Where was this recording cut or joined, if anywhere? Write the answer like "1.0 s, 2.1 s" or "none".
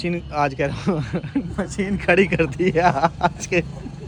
none